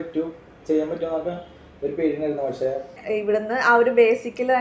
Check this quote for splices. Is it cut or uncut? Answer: cut